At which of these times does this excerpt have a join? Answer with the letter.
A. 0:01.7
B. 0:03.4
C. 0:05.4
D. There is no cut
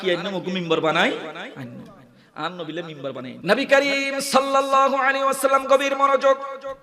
B